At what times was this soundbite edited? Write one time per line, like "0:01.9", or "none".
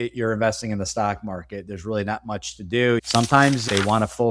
0:03.0